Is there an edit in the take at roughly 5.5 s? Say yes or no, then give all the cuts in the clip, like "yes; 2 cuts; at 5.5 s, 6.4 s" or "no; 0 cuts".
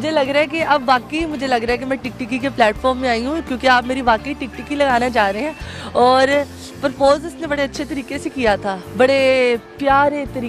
no; 0 cuts